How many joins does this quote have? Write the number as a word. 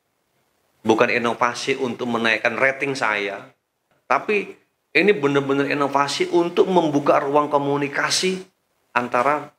one